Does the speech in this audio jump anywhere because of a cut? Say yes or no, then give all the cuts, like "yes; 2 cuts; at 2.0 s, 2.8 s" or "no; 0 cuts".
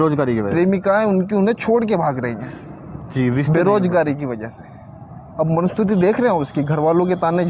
no; 0 cuts